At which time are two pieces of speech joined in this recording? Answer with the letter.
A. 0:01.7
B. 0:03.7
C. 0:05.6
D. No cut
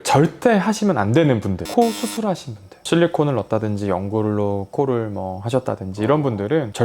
D